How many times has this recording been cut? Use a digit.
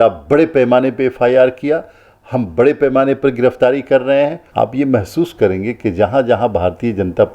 1